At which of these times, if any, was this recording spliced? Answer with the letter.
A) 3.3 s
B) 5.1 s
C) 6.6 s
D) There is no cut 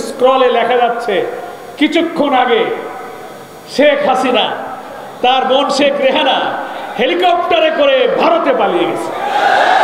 D